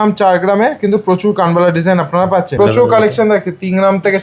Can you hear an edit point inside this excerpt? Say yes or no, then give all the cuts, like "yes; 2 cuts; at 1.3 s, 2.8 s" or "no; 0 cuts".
yes; 1 cut; at 2.5 s